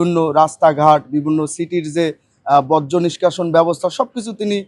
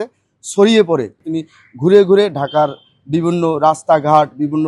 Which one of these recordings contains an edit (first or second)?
second